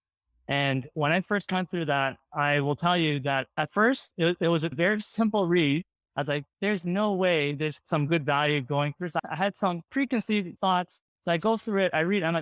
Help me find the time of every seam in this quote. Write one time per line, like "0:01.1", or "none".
0:04.7
0:07.8
0:09.2
0:10.5